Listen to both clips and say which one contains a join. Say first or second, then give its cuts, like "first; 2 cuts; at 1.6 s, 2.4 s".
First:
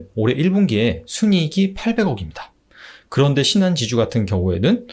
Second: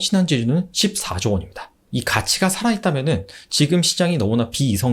second; 1 cut; at 1.9 s